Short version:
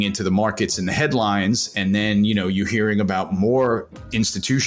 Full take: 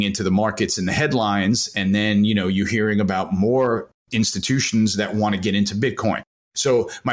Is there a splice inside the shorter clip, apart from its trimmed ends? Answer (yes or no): no